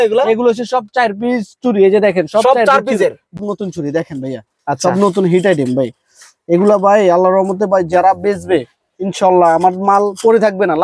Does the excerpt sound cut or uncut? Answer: cut